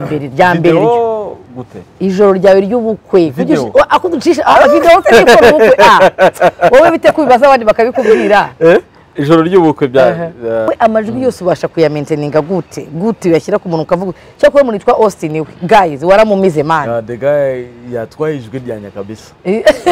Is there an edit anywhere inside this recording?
yes; 1 cut; at 10.7 s

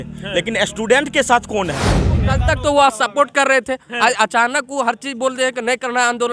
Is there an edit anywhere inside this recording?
yes; 1 cut; at 2.1 s

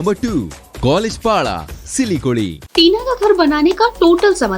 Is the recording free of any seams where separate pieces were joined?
no; 1 cut; at 2.6 s

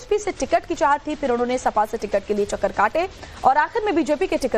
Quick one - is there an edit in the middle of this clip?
no; 0 cuts

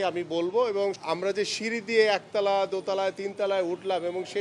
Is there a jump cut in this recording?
yes; 1 cut; at 1.0 s

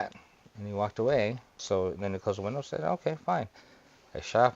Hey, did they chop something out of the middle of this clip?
yes; 1 cut; at 1.5 s

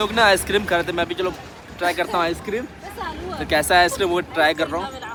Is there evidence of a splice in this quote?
no; 0 cuts

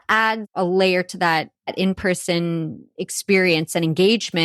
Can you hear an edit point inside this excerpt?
no; 0 cuts

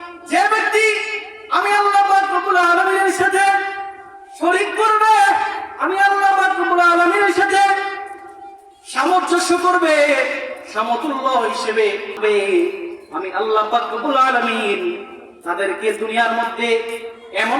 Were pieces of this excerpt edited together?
yes; 1 cut; at 12.1 s

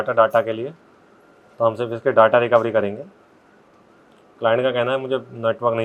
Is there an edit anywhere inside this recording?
no; 0 cuts

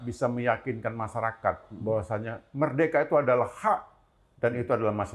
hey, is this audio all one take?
yes; 0 cuts

